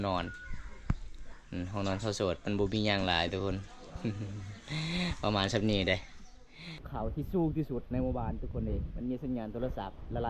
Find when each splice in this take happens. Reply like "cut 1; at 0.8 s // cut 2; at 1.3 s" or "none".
cut 1; at 6.8 s